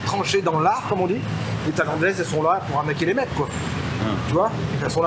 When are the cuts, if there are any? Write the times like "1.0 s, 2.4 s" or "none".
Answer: none